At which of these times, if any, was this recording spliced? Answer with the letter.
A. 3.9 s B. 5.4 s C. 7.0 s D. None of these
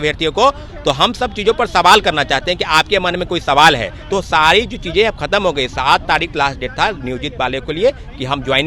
A